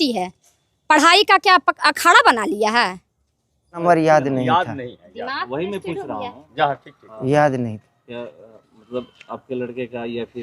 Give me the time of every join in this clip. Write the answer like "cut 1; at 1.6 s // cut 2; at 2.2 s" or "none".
cut 1; at 3.8 s